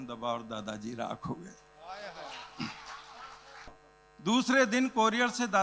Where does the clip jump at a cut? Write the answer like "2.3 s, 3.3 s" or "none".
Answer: 3.7 s